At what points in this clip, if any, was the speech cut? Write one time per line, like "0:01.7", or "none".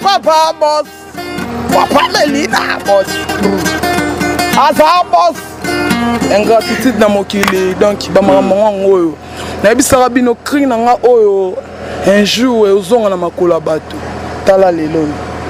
none